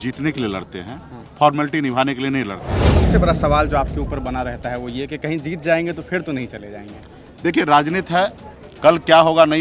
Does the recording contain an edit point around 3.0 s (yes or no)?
yes